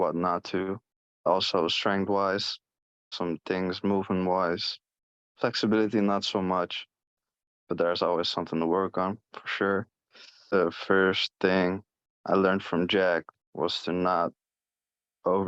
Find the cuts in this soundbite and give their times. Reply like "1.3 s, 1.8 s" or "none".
1.3 s, 3.1 s, 10.5 s